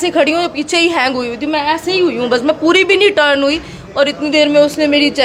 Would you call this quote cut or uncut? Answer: uncut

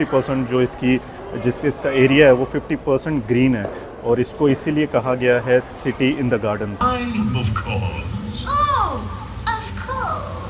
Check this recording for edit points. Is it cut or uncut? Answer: cut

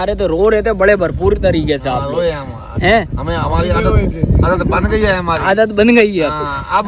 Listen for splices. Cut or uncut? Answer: uncut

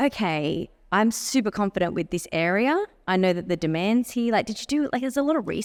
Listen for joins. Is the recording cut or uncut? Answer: uncut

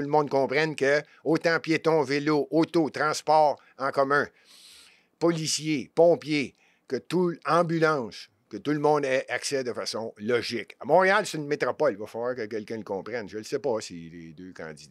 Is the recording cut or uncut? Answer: uncut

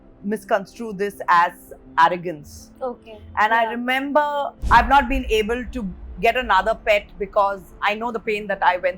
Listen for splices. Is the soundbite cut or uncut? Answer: cut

